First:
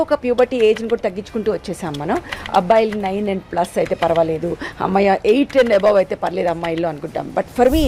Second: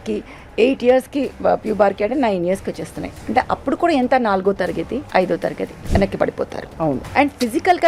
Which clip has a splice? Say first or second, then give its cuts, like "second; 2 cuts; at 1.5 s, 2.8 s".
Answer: second; 3 cuts; at 5.1 s, 5.7 s, 7.0 s